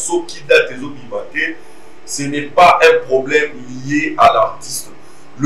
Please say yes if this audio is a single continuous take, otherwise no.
yes